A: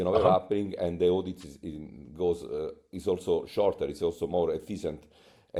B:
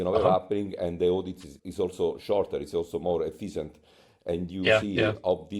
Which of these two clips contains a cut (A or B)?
B